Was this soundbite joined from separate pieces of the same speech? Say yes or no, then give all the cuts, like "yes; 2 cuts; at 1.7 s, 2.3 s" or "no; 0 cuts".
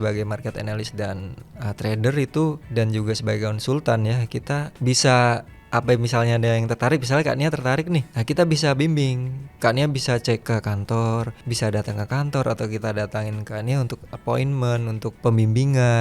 yes; 7 cuts; at 2.6 s, 4.7 s, 5.5 s, 8.2 s, 10.4 s, 11.4 s, 15.1 s